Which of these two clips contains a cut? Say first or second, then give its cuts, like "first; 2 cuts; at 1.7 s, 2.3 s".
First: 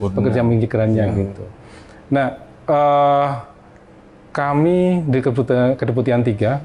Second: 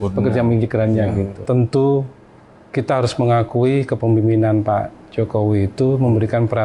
second; 1 cut; at 1.4 s